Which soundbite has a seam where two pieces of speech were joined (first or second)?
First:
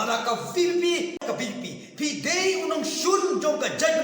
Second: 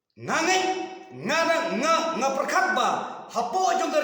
first